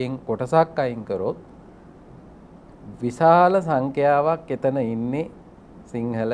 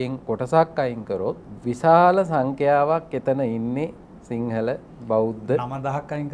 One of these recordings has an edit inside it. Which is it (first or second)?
second